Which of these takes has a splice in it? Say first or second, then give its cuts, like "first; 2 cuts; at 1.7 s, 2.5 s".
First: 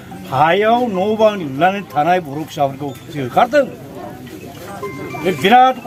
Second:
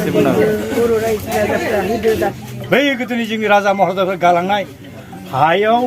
second; 1 cut; at 2.3 s